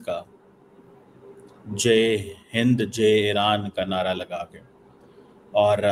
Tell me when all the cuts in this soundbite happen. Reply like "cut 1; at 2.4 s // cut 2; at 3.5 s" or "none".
none